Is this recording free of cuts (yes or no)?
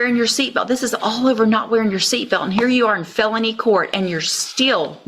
yes